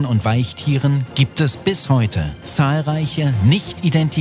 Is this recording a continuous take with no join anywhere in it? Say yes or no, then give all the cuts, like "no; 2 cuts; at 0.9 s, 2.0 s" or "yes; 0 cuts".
yes; 0 cuts